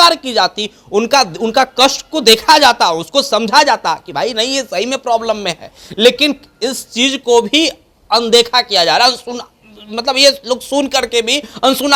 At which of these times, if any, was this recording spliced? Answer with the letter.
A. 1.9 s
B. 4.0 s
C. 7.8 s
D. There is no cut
D